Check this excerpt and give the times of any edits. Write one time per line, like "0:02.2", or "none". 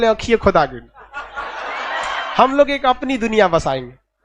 0:02.2